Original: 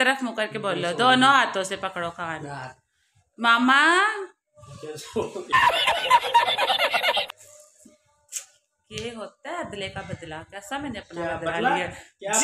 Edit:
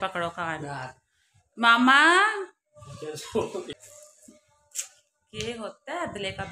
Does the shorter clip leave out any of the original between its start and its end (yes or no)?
yes